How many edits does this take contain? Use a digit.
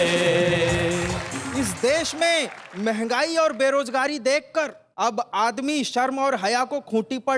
1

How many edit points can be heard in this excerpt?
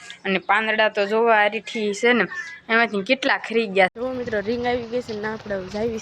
1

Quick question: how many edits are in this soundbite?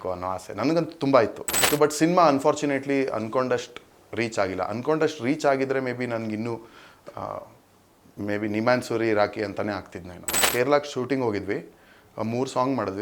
2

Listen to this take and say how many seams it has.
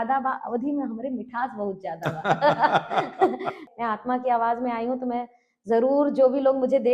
1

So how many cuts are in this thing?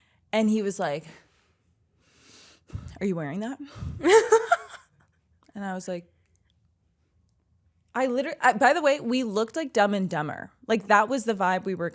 0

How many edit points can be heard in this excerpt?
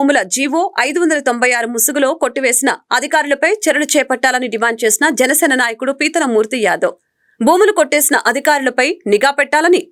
0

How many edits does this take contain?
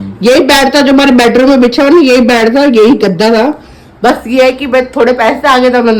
0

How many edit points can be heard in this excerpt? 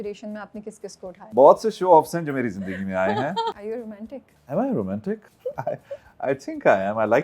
3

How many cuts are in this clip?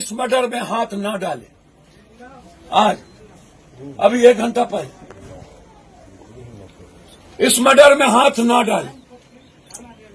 0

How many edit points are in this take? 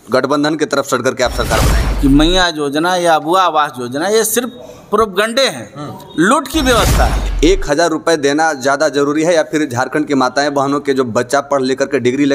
2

